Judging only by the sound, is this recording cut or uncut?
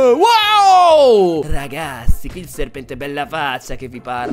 uncut